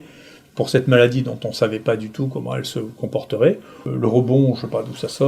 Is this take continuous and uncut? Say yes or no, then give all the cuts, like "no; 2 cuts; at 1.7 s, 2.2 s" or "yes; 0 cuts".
no; 1 cut; at 3.7 s